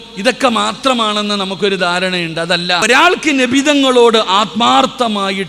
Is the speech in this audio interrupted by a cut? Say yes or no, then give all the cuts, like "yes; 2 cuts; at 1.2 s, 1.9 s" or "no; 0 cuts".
yes; 1 cut; at 2.8 s